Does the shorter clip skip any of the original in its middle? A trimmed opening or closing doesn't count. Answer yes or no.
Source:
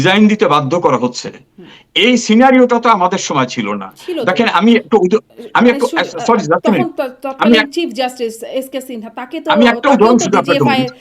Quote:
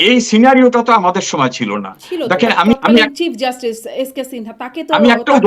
yes